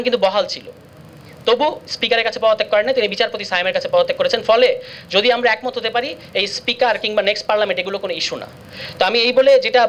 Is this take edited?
no; 0 cuts

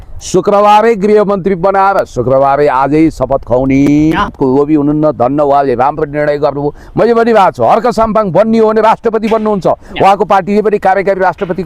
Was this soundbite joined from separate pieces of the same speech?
yes; 1 cut; at 4.4 s

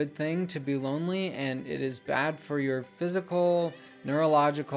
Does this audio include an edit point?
no; 0 cuts

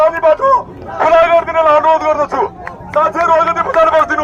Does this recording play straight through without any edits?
yes; 0 cuts

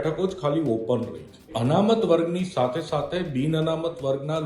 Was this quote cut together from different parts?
yes; 1 cut; at 1.5 s

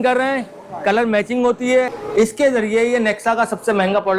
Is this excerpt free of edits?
no; 1 cut; at 2.0 s

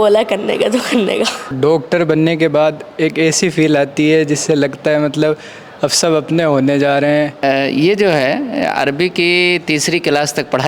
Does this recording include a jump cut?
yes; 2 cuts; at 1.5 s, 7.4 s

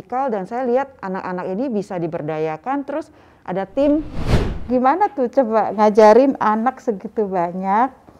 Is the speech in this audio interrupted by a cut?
yes; 1 cut; at 4.3 s

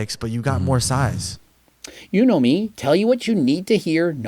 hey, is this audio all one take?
no; 1 cut; at 1.2 s

